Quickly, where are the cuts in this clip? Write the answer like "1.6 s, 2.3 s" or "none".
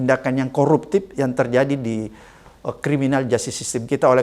none